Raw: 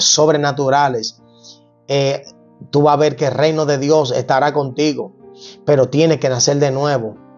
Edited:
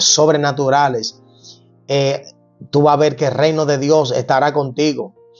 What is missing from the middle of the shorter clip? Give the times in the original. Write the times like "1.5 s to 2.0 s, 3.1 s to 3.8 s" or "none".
none